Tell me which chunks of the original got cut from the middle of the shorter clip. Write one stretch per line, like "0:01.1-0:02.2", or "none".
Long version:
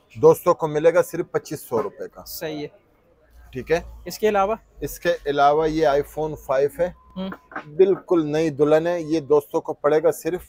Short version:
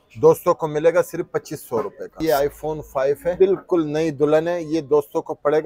0:02.2-0:05.7
0:06.9-0:07.7